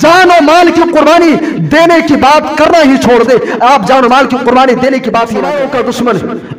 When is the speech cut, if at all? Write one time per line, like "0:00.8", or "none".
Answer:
0:05.5

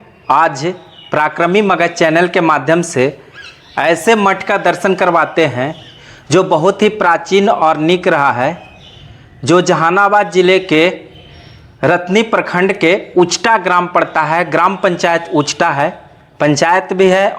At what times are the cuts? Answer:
none

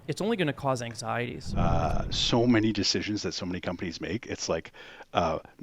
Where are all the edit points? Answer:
0:01.5

